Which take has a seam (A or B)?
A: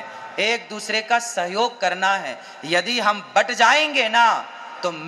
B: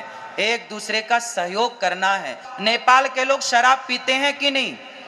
B